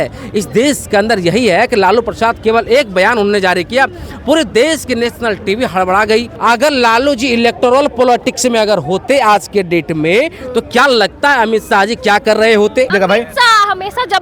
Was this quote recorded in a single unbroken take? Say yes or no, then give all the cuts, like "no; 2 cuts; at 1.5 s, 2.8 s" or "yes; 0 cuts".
no; 2 cuts; at 6.3 s, 12.9 s